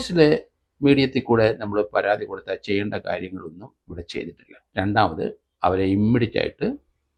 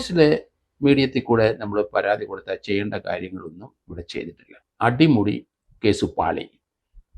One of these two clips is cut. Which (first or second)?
second